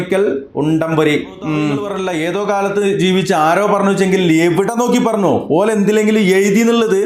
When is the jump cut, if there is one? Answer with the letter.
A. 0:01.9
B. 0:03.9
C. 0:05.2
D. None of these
A